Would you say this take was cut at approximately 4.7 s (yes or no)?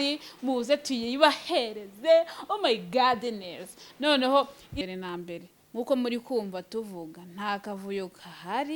yes